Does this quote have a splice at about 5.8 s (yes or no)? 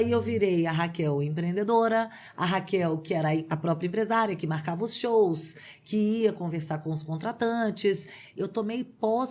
no